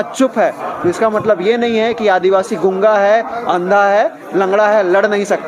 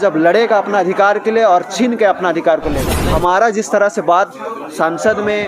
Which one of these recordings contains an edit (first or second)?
second